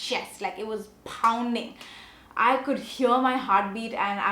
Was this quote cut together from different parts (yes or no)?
no